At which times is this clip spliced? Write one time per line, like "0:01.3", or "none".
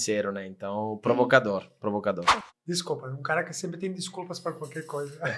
0:02.5